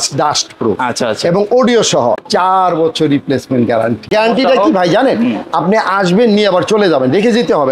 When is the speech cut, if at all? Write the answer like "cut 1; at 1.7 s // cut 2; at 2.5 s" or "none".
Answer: cut 1; at 2.2 s // cut 2; at 4.1 s